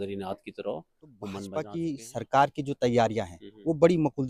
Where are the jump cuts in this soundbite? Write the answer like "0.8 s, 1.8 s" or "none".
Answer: 1.4 s